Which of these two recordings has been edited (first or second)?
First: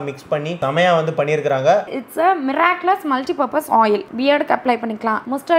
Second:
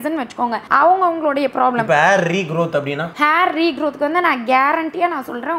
first